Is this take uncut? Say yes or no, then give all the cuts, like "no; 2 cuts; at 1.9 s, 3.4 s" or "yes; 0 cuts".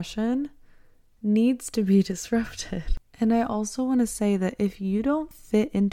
yes; 0 cuts